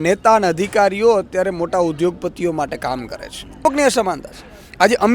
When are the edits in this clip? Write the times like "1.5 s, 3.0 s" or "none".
3.6 s